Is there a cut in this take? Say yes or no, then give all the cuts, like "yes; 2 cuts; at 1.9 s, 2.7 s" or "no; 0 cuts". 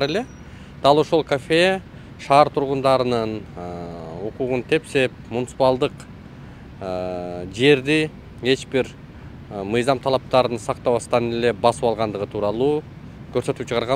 no; 0 cuts